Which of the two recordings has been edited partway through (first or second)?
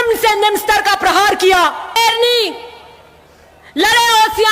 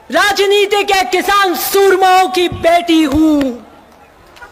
first